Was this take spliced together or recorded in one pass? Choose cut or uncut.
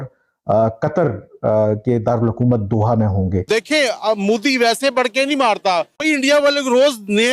cut